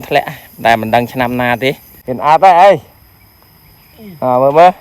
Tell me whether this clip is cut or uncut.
cut